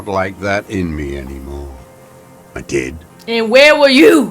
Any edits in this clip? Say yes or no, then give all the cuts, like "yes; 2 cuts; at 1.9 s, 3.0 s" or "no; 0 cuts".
yes; 1 cut; at 3.1 s